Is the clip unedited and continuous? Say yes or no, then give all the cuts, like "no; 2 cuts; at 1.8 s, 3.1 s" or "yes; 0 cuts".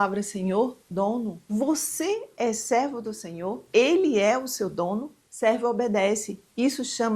no; 2 cuts; at 1.4 s, 5.2 s